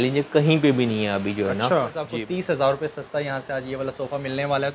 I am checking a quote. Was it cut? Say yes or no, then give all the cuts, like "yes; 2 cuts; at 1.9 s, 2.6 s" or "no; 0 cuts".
yes; 1 cut; at 2.0 s